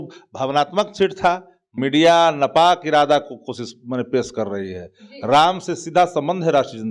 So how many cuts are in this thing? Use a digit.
1